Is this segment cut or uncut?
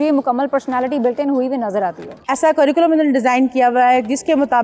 cut